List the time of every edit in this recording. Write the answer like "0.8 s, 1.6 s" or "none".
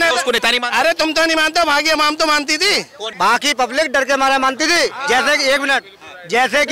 3.0 s